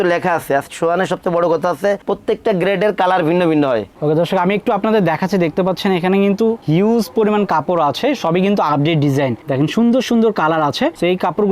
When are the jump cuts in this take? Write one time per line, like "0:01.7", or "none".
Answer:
0:03.9